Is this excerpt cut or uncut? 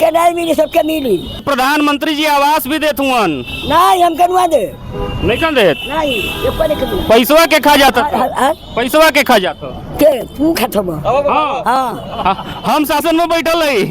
cut